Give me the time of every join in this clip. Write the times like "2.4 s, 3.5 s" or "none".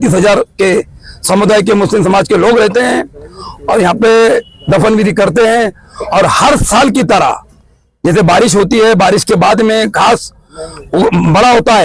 none